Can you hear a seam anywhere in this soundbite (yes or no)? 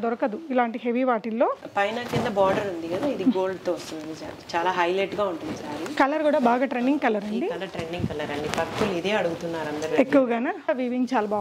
yes